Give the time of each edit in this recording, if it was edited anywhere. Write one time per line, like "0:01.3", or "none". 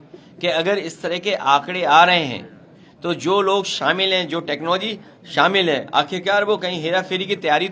none